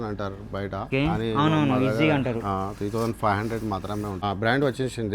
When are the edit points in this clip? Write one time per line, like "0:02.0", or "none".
0:00.9
0:04.2